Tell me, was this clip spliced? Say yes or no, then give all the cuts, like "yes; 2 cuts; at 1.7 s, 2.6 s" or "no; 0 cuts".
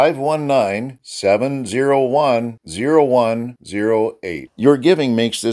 no; 0 cuts